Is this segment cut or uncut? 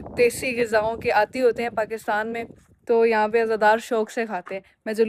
uncut